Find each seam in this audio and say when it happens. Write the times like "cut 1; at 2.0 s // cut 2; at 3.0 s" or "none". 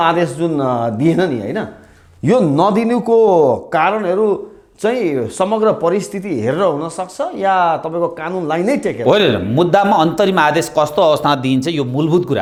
none

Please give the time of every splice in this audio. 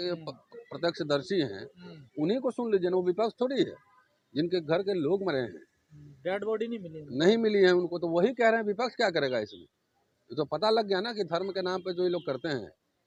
none

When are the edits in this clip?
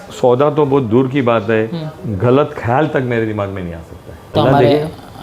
cut 1; at 4.3 s

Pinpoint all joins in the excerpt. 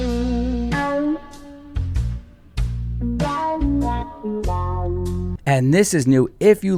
none

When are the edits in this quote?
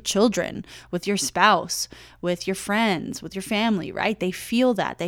none

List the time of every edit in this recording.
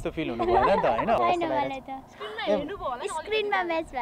cut 1; at 1.2 s

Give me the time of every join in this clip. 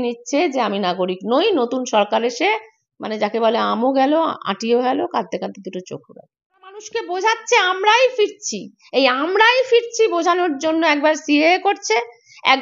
cut 1; at 6.9 s

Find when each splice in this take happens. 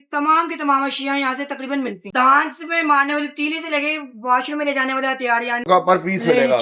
cut 1; at 2.0 s // cut 2; at 5.7 s

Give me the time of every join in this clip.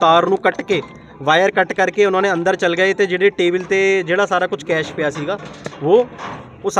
none

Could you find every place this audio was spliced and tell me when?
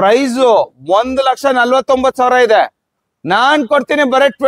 none

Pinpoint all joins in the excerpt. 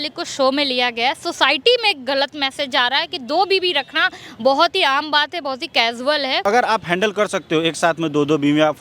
cut 1; at 6.4 s

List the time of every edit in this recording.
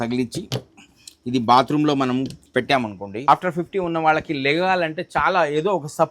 cut 1; at 3.3 s

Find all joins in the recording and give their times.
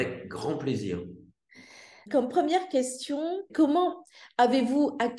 cut 1; at 1.9 s // cut 2; at 3.5 s

